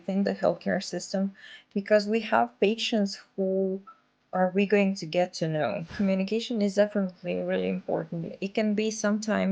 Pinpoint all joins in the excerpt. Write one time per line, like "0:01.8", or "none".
0:05.9